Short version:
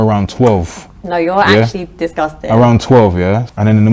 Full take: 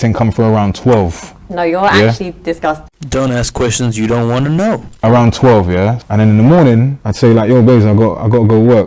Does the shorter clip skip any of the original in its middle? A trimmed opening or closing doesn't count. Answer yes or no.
yes